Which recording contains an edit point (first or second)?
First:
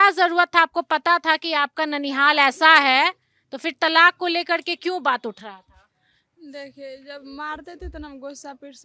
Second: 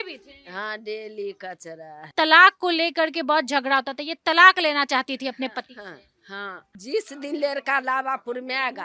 second